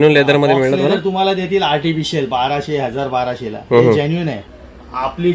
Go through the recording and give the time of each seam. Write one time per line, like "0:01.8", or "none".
0:04.4